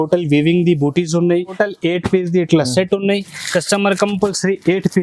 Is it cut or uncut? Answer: cut